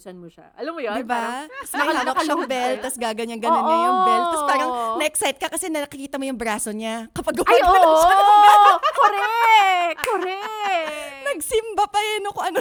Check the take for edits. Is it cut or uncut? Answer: uncut